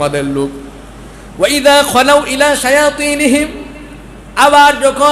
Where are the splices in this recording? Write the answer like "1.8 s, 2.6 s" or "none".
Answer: none